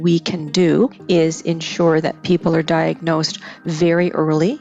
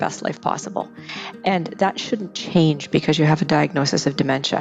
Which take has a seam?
first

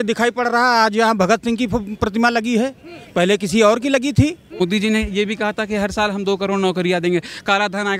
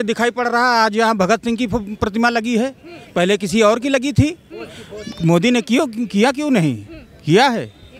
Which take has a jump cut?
first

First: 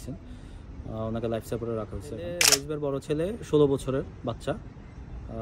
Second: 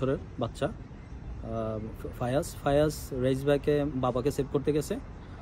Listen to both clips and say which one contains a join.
first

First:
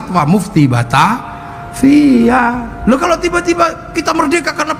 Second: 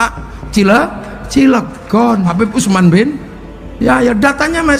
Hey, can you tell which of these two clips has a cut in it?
second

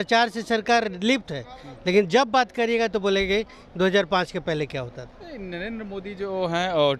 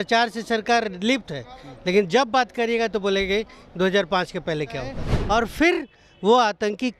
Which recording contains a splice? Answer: second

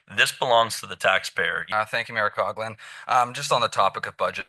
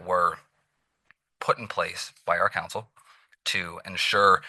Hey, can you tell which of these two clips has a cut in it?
first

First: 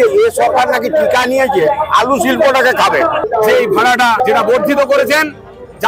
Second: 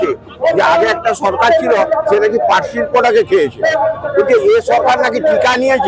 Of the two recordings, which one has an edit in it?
first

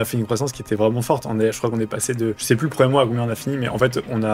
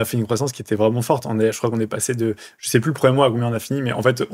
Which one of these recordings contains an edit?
first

